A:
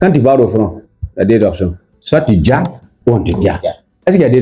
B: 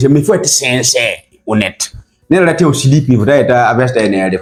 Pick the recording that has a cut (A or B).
A